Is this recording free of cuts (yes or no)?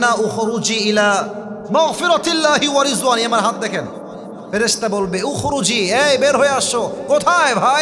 no